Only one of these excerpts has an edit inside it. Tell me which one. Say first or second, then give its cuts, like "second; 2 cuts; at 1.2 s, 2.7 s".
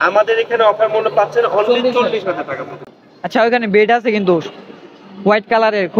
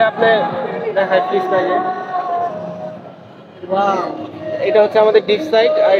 first; 1 cut; at 2.8 s